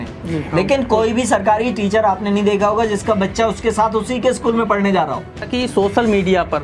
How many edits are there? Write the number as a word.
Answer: one